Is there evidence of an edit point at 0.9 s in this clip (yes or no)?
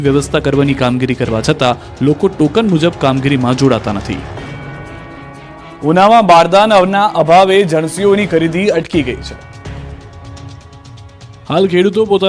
yes